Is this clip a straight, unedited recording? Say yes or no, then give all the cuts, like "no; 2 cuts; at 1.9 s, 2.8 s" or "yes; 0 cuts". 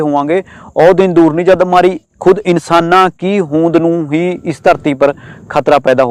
yes; 0 cuts